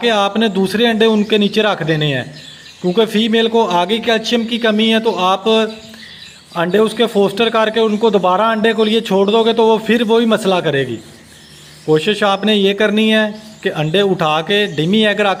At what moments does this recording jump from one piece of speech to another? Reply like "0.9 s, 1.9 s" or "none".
none